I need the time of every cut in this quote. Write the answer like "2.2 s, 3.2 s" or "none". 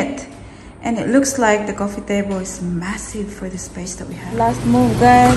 4.2 s